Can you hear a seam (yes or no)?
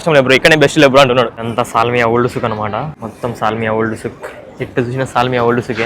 yes